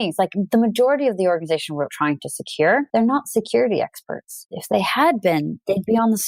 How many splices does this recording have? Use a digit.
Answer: 2